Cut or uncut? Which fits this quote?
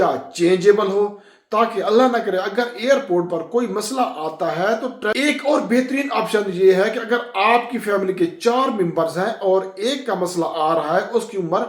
cut